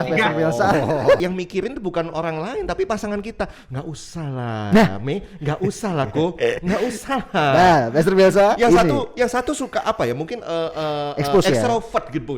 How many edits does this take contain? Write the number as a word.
one